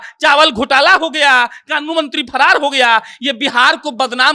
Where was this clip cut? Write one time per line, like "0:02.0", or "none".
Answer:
none